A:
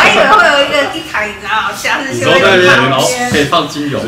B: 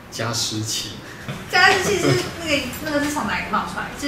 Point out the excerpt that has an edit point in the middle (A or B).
B